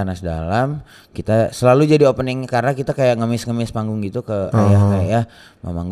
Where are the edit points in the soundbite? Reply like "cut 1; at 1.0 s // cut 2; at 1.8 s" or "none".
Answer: none